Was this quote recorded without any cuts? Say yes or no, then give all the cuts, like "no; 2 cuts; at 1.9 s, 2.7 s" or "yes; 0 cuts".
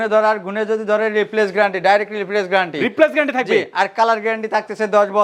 yes; 0 cuts